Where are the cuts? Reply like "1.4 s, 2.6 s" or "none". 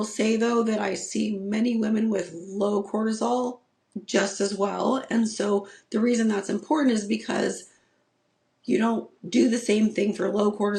none